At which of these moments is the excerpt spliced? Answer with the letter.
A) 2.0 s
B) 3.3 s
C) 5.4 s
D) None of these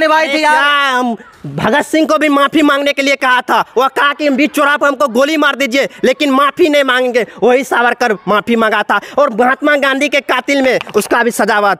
D